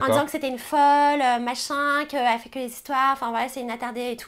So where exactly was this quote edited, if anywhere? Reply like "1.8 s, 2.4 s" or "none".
none